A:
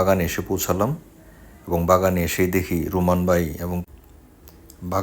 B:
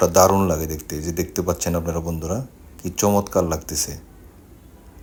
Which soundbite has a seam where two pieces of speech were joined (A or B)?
A